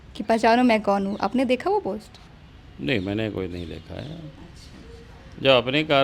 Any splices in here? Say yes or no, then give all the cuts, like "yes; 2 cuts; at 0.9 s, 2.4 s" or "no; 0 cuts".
no; 0 cuts